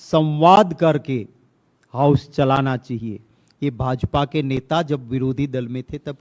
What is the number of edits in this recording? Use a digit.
0